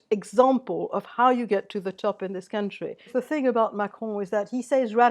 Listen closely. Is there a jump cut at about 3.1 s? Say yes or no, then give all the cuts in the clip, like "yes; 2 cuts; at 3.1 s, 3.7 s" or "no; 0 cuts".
yes; 1 cut; at 3.1 s